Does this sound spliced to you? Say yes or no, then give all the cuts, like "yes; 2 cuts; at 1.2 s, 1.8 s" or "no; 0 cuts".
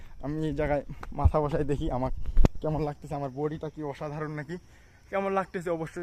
no; 0 cuts